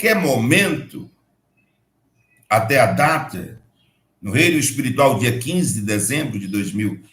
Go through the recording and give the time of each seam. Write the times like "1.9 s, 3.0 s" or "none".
none